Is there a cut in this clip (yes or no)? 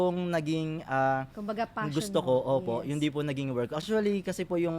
yes